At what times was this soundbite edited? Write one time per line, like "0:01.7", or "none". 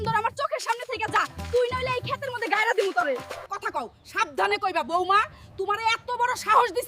0:03.3